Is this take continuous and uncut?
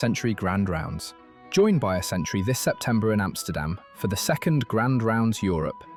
yes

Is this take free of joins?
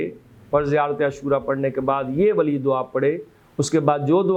yes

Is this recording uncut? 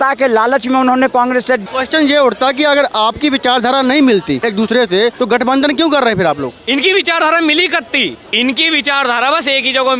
no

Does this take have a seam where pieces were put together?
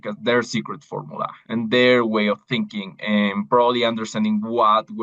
no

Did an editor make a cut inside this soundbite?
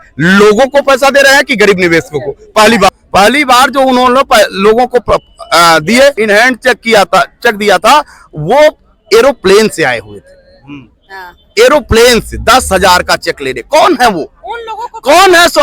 yes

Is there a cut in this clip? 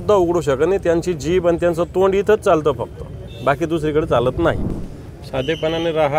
yes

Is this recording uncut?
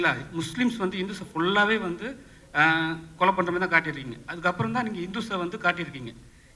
yes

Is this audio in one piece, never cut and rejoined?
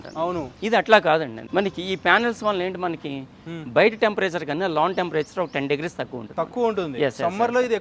no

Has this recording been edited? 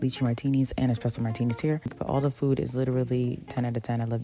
yes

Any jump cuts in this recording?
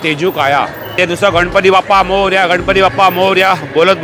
yes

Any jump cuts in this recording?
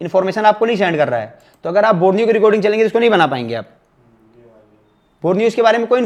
no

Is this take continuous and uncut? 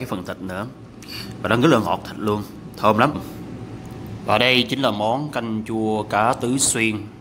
no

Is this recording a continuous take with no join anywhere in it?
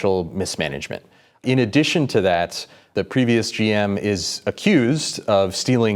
no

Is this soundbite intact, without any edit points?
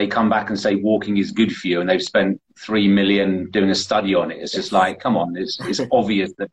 yes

